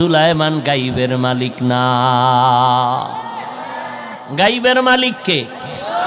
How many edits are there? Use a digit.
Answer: 0